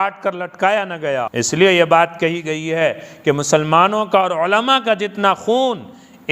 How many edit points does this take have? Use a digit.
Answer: 1